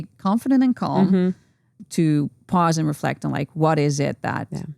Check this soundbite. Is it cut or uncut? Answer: cut